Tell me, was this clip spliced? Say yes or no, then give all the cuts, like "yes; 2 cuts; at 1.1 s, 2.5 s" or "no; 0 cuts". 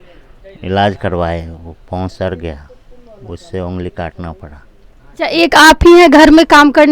yes; 1 cut; at 5.3 s